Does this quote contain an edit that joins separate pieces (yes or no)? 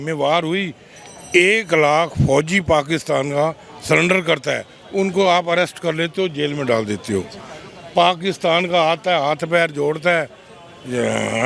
no